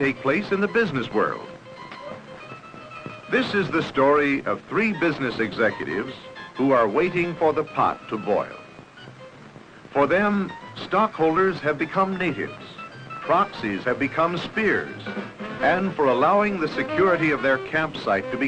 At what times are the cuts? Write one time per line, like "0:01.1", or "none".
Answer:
0:13.3